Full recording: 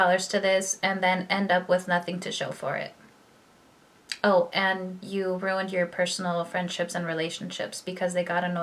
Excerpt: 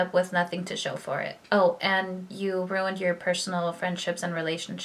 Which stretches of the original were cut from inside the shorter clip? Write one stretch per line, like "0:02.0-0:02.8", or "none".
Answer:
0:02.9-0:04.1